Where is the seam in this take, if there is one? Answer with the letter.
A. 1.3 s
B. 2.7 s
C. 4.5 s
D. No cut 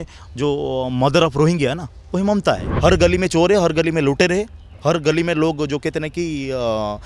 B